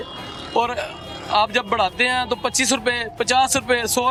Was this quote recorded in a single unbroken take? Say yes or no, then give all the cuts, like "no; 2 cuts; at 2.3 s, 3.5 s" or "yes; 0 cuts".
yes; 0 cuts